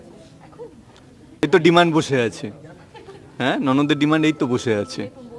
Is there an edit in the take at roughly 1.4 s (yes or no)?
no